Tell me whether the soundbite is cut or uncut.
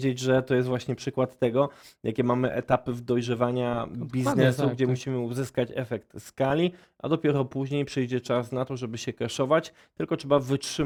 uncut